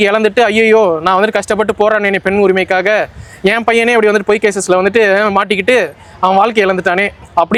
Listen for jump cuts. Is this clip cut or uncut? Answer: uncut